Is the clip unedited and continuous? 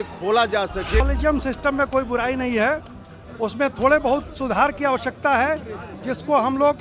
no; 1 cut; at 1.0 s

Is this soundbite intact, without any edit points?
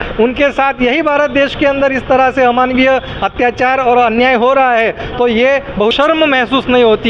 no; 1 cut; at 5.9 s

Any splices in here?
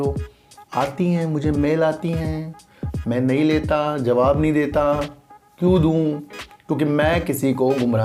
no; 0 cuts

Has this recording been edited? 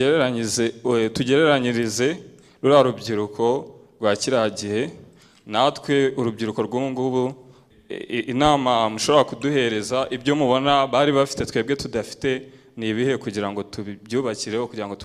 no; 0 cuts

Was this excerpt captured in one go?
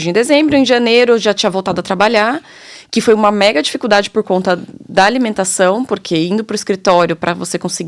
yes; 0 cuts

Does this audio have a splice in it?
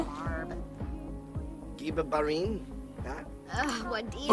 no; 0 cuts

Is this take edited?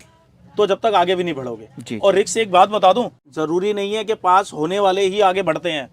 yes; 1 cut; at 3.2 s

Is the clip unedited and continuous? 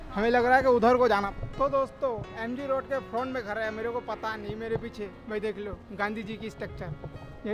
no; 1 cut; at 1.3 s

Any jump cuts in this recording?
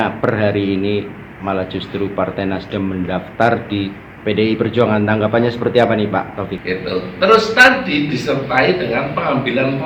yes; 1 cut; at 6.6 s

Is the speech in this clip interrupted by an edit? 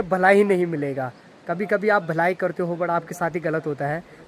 no; 0 cuts

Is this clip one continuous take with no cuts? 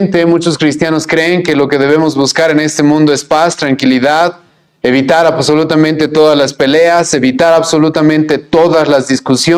yes; 0 cuts

